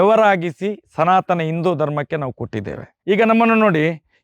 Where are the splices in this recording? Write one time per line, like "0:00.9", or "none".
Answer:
0:03.1

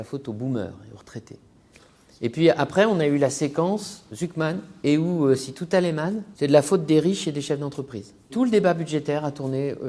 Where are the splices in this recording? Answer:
0:04.7
0:06.2
0:08.3

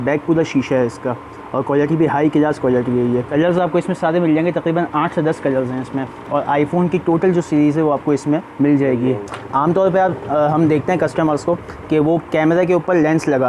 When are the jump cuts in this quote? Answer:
0:03.3
0:06.3
0:08.5
0:09.3

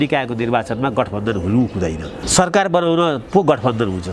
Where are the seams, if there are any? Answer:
0:02.2

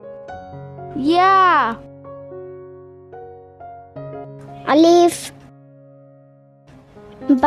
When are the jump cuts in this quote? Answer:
0:03.9

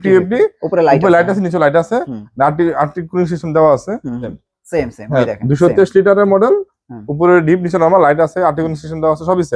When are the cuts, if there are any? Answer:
0:04.4

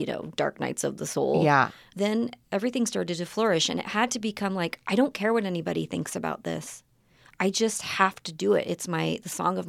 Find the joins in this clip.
0:01.9

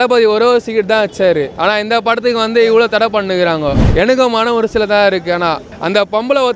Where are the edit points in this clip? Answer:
0:01.5
0:03.8
0:05.7

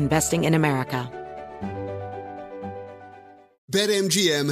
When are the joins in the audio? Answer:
0:01.1
0:03.5

